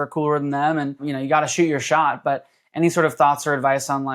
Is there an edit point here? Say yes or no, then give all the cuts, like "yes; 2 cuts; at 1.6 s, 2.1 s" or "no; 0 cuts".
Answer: no; 0 cuts